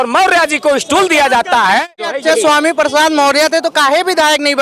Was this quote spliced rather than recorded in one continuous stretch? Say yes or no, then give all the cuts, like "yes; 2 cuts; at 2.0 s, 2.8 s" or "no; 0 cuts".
yes; 1 cut; at 2.0 s